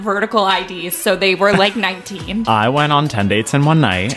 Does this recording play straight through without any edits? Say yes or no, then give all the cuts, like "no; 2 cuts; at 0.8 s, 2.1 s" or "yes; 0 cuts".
no; 1 cut; at 2.4 s